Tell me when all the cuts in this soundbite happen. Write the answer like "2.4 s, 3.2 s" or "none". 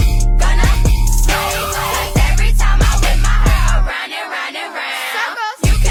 none